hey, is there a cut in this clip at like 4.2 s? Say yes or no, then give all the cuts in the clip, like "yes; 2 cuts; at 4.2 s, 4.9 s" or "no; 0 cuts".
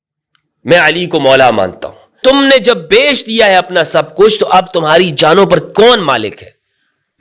no; 1 cut; at 2.2 s